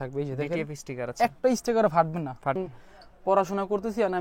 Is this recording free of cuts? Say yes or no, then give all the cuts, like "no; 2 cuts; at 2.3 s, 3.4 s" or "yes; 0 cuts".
no; 1 cut; at 2.6 s